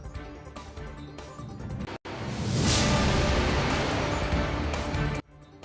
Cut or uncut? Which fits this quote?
uncut